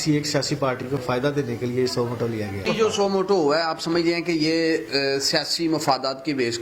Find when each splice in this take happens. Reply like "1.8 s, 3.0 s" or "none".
0.9 s, 2.6 s